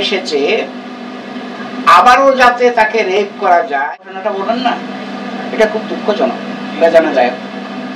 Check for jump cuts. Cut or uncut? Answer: cut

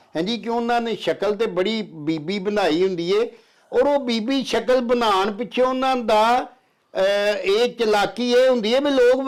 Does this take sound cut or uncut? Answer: uncut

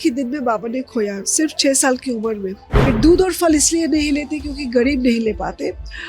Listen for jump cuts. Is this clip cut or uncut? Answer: cut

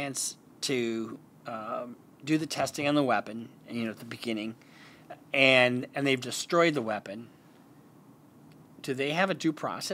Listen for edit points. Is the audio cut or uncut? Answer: uncut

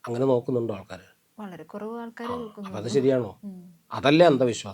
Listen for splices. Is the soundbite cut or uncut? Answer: cut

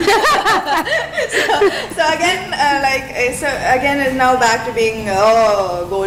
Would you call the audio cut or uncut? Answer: uncut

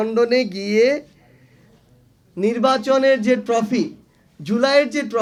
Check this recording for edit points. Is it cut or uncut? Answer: uncut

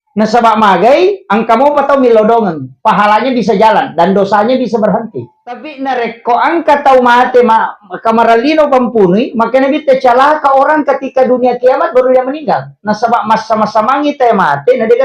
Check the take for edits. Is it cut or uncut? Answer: cut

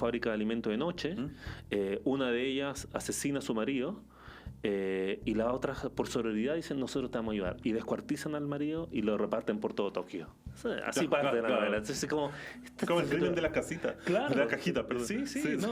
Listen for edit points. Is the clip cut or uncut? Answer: uncut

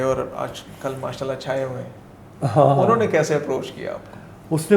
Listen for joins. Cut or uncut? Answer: uncut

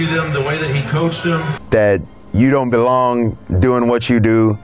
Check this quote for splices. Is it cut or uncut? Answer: cut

